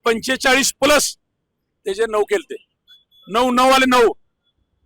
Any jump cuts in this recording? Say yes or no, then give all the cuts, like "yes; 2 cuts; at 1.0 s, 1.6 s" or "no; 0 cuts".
no; 0 cuts